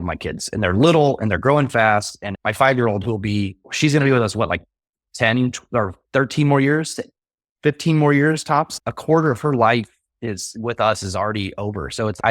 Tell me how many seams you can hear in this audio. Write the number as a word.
one